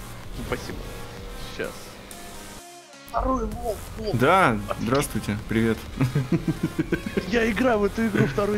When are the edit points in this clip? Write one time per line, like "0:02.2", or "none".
0:02.9